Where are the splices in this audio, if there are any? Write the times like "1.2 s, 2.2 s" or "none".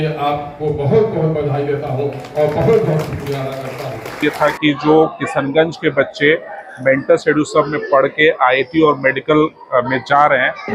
4.2 s